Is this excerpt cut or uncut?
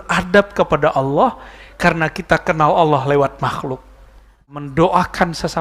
cut